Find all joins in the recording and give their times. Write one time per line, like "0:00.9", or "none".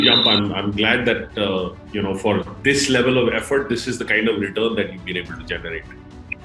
none

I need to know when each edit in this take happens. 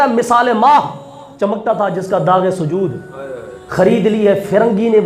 none

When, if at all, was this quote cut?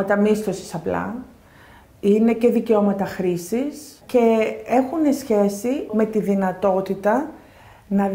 0:04.0
0:05.9

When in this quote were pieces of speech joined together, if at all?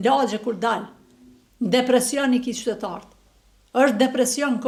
none

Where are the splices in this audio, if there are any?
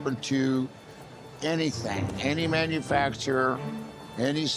none

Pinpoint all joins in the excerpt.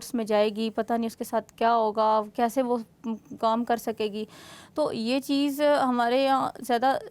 none

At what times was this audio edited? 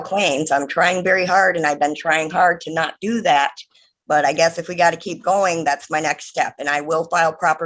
none

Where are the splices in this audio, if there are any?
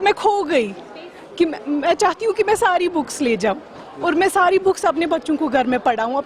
none

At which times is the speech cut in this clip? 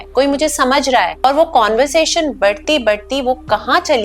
0:01.2

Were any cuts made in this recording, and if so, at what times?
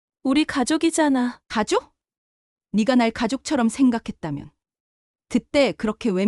0:01.4

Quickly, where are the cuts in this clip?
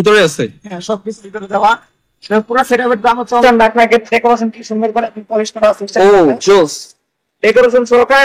0:03.3

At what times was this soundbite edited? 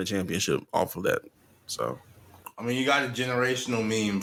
none

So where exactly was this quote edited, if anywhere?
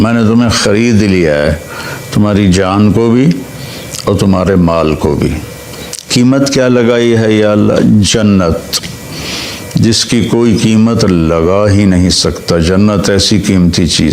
none

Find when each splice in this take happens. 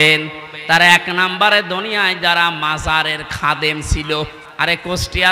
0:04.4

